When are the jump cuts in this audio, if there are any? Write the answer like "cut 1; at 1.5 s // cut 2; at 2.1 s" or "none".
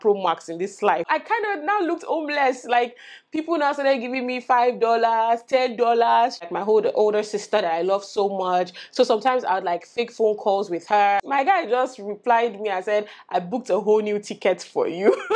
cut 1; at 1.1 s // cut 2; at 6.5 s // cut 3; at 11.2 s